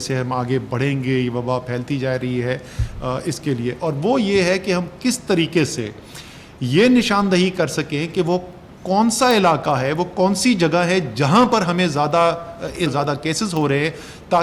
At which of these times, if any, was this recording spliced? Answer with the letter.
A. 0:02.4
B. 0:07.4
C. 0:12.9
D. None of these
C